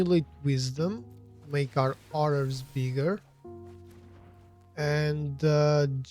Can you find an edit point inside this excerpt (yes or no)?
yes